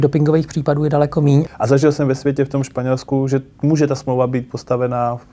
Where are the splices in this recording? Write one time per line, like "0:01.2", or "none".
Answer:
0:01.5